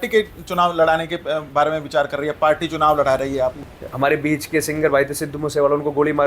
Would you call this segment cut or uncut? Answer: cut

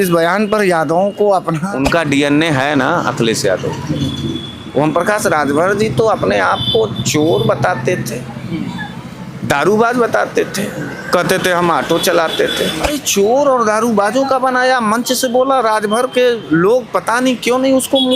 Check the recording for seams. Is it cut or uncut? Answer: cut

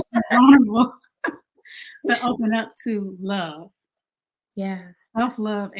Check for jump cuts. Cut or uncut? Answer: uncut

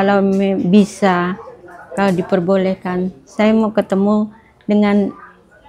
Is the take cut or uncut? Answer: uncut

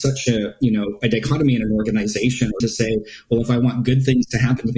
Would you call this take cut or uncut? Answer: cut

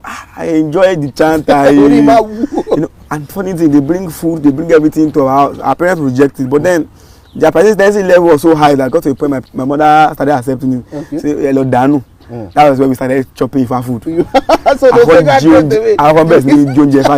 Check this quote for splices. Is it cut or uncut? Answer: uncut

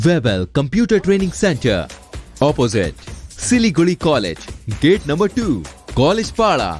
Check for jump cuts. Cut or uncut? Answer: uncut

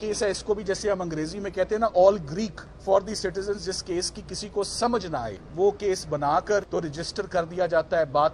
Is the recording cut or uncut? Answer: cut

